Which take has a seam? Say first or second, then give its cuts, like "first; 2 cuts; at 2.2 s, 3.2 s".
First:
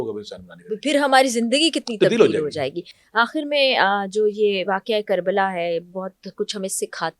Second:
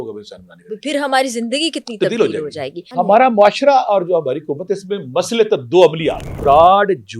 second; 2 cuts; at 2.9 s, 6.3 s